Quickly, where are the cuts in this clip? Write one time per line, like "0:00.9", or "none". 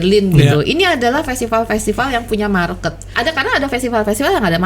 0:03.1